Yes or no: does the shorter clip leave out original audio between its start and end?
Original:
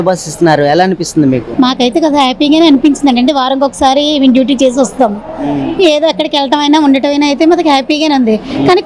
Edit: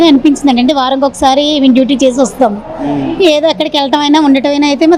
no